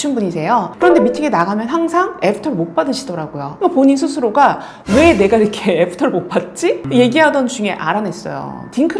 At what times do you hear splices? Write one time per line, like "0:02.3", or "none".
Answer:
none